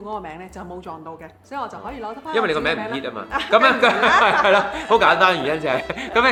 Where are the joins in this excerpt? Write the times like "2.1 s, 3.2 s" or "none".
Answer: none